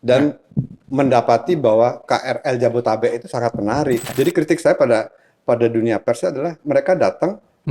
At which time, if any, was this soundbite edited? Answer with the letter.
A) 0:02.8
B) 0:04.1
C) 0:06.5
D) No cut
B